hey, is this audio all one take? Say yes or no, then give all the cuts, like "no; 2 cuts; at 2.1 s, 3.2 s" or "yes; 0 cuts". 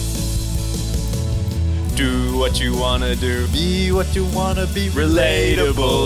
yes; 0 cuts